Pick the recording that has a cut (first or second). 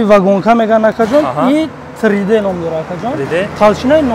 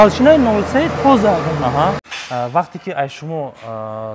second